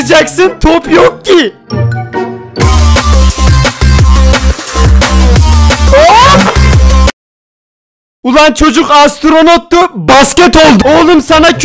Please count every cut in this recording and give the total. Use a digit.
0